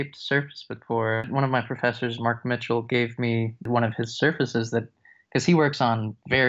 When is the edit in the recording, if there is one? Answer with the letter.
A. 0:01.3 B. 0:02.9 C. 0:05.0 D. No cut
A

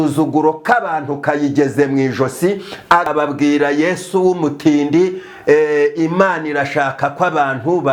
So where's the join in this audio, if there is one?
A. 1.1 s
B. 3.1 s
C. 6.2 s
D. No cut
B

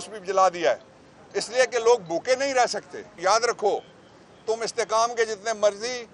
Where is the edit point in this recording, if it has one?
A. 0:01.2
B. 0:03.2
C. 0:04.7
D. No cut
B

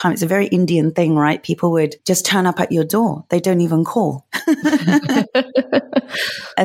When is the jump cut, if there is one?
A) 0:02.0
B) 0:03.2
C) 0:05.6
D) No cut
A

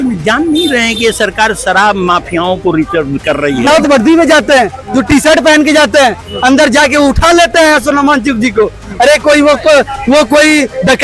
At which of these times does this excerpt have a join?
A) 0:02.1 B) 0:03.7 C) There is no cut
B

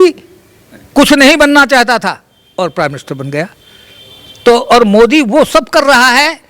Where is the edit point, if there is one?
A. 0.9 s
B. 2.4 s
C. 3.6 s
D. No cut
D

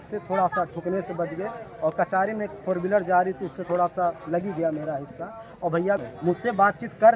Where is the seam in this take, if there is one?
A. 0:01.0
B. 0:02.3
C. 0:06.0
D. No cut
C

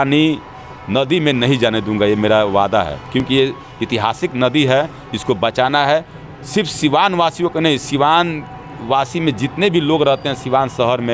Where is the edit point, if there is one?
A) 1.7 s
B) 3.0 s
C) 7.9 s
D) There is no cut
D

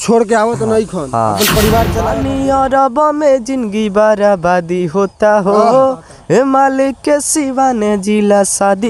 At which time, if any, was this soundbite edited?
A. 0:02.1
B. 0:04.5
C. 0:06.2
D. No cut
A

